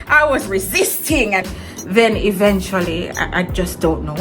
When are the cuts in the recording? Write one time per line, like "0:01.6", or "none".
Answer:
0:01.5